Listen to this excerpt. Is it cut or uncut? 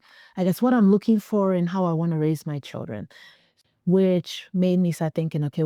cut